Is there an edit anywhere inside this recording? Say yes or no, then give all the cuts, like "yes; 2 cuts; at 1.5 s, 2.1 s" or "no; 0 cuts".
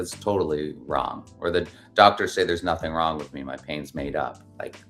no; 0 cuts